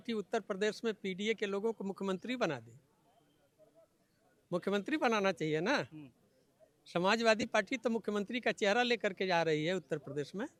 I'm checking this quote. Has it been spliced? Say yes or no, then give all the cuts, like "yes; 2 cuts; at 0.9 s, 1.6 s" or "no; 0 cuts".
no; 0 cuts